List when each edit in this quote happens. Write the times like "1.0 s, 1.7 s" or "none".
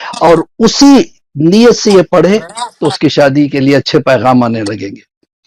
none